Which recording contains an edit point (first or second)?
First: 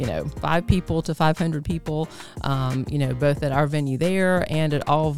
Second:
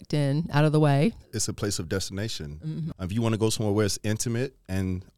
second